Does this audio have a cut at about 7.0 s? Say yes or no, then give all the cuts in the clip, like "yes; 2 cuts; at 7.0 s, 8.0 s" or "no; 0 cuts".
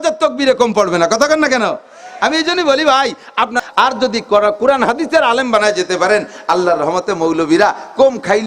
no; 1 cut; at 3.6 s